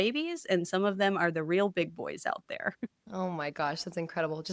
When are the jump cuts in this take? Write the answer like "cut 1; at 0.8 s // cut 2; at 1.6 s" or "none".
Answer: none